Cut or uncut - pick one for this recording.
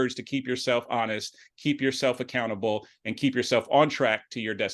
uncut